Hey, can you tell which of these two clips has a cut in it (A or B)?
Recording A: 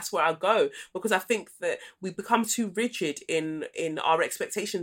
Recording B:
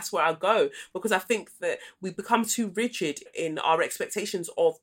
B